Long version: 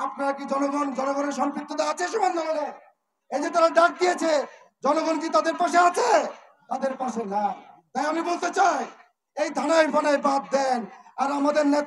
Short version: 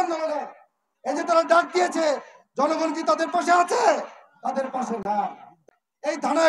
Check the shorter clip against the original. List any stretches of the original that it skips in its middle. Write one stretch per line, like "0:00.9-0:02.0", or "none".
0:07.8-0:08.9